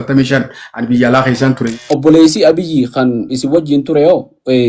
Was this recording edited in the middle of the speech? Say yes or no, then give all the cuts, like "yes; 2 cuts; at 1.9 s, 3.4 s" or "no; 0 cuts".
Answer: yes; 1 cut; at 1.6 s